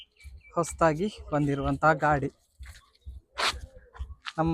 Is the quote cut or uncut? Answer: uncut